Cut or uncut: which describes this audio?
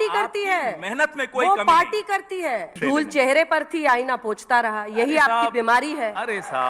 cut